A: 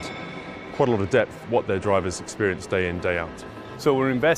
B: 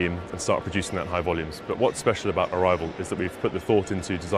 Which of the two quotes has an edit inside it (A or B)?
A